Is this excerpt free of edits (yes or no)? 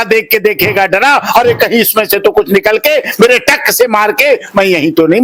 yes